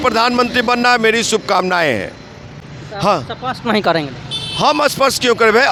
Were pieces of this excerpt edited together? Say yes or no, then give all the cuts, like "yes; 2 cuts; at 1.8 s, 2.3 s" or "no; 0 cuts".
no; 0 cuts